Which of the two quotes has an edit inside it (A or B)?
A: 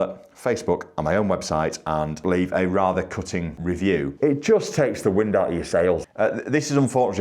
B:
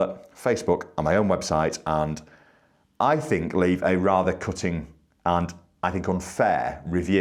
A